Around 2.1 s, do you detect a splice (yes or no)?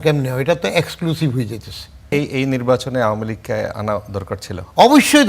yes